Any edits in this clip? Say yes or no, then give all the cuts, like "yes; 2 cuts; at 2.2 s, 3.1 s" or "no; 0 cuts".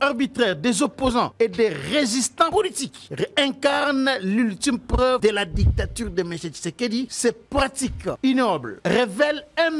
yes; 5 cuts; at 1.3 s, 2.5 s, 5.2 s, 7.1 s, 8.2 s